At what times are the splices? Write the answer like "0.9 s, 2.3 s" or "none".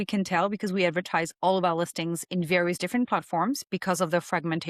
none